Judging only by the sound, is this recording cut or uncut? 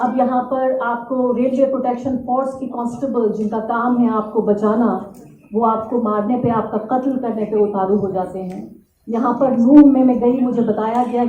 uncut